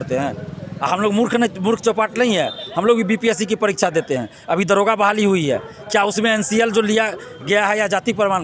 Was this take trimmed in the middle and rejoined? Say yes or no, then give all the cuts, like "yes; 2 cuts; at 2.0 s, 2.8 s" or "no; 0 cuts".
no; 0 cuts